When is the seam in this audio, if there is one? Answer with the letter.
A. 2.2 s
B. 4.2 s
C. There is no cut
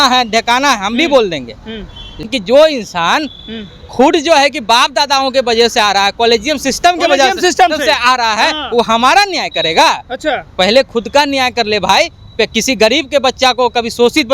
A